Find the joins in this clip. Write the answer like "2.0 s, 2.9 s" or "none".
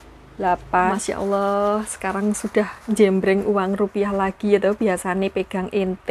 0.9 s